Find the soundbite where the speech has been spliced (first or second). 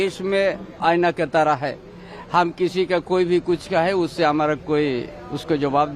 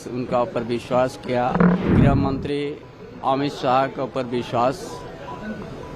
second